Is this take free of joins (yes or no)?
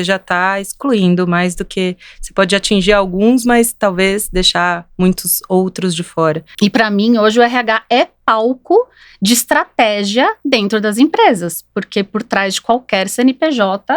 no